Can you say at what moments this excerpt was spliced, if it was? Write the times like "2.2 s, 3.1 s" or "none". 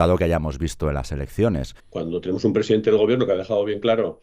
1.8 s